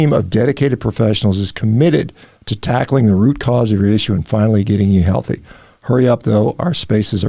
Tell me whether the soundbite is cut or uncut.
uncut